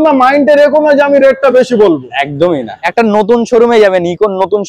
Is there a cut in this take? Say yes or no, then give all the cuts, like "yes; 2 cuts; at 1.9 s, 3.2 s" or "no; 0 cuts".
yes; 1 cut; at 2.8 s